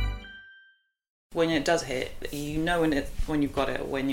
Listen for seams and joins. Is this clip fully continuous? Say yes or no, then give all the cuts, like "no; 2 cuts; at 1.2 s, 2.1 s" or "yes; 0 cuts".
no; 1 cut; at 1.2 s